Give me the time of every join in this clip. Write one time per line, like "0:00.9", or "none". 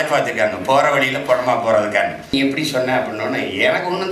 0:02.3